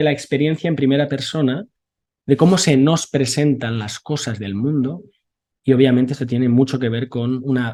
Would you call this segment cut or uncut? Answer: uncut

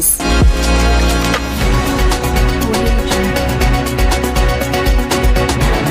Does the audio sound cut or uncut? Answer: cut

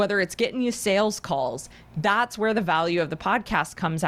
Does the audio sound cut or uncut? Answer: uncut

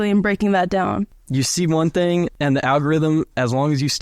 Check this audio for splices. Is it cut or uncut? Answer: cut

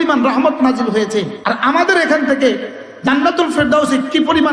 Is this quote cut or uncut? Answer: cut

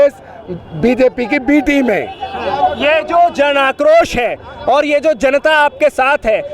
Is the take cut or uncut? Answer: uncut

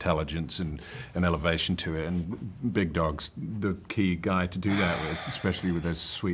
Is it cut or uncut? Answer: uncut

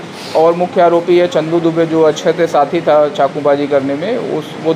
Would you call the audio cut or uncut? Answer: uncut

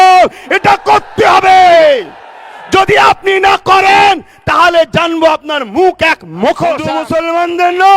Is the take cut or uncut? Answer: cut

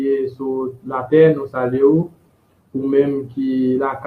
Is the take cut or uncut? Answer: uncut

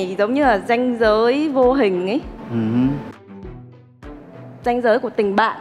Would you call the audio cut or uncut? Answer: uncut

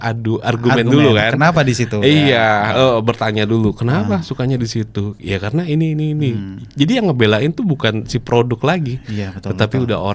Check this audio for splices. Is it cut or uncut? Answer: uncut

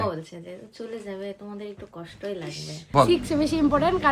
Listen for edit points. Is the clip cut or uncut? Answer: cut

